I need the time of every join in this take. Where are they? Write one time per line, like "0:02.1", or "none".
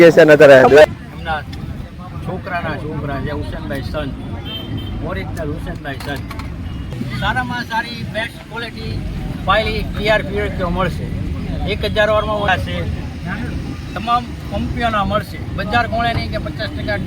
0:00.9
0:06.9
0:12.5